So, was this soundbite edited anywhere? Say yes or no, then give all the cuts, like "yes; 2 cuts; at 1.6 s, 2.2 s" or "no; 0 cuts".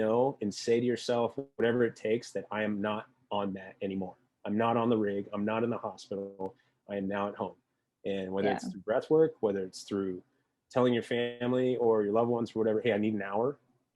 no; 0 cuts